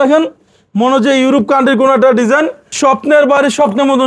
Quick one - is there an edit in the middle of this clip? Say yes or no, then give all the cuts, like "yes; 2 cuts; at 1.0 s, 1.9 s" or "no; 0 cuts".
yes; 1 cut; at 2.6 s